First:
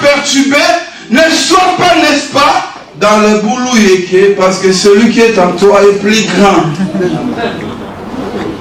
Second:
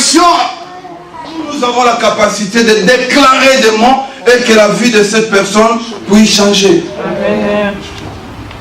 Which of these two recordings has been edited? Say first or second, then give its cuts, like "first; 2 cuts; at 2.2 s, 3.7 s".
second; 1 cut; at 1.5 s